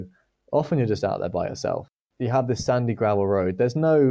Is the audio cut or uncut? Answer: cut